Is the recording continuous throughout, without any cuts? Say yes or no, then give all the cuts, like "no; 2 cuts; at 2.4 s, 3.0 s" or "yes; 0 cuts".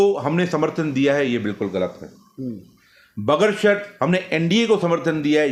yes; 0 cuts